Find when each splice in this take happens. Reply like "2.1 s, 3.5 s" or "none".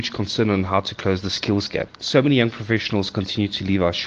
2.0 s